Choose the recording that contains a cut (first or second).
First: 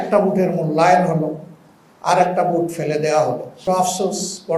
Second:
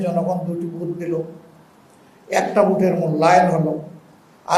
first